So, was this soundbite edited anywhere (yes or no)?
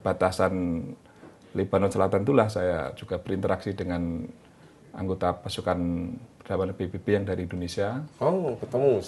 no